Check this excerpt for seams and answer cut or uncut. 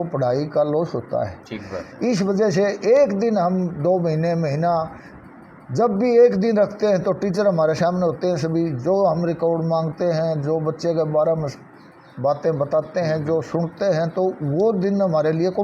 uncut